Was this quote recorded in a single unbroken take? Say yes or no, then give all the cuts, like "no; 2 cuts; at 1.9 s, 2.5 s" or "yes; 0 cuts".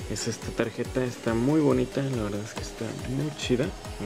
yes; 0 cuts